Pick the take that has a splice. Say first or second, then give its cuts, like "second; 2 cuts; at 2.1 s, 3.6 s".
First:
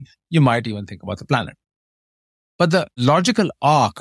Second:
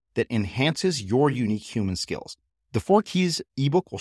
first; 1 cut; at 3.0 s